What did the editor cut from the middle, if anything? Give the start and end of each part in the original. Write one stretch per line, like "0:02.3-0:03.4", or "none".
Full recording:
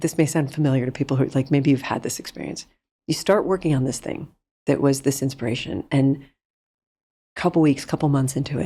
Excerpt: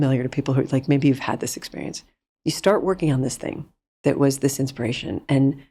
none